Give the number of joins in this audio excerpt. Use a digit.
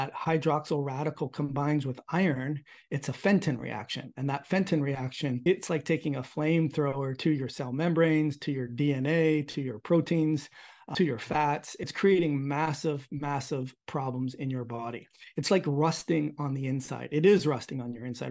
3